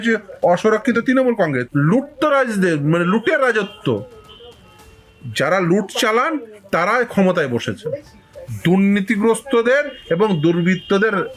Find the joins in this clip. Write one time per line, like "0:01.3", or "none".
0:01.6